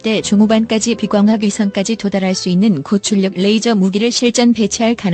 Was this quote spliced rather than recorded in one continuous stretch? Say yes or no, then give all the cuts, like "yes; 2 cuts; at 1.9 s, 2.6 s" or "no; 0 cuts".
no; 0 cuts